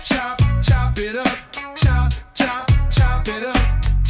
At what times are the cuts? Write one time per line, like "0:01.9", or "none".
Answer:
none

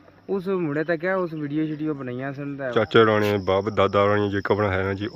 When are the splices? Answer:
0:02.7

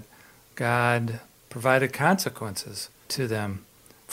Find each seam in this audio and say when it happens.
0:03.1

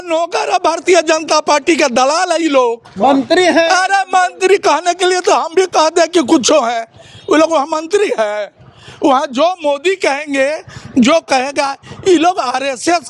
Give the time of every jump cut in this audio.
none

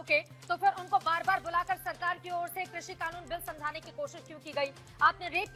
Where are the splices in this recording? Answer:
none

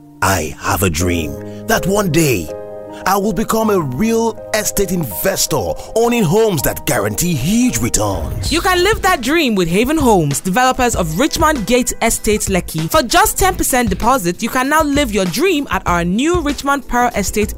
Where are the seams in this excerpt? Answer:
none

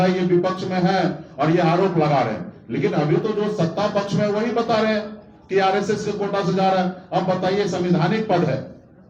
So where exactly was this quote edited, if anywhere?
none

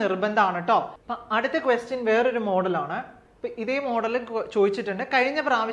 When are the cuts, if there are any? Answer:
0:01.0

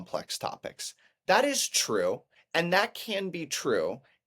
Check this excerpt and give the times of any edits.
0:02.3

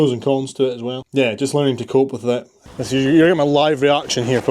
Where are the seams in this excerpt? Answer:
0:01.0
0:02.7

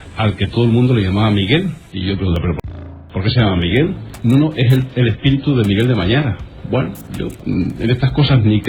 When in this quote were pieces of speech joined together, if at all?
0:01.9
0:04.1
0:07.4

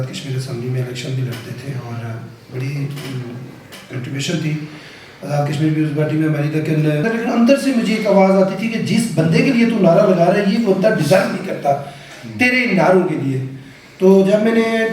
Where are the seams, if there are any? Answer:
0:07.1

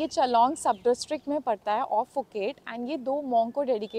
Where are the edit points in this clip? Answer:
none

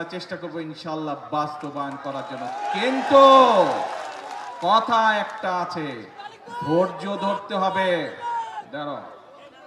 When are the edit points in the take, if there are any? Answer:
none

